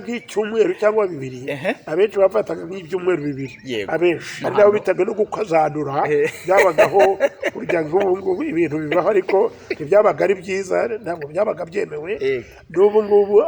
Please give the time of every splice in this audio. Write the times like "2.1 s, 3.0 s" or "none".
4.3 s